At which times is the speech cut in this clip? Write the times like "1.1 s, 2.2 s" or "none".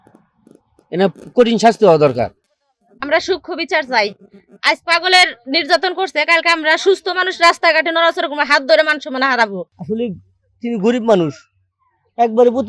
2.3 s, 9.7 s